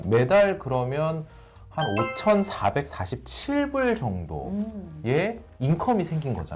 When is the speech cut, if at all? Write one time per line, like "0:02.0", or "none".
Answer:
none